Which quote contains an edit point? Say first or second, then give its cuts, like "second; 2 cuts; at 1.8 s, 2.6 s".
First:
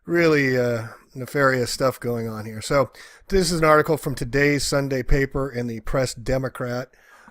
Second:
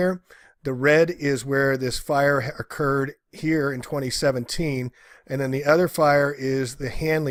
first; 1 cut; at 2.3 s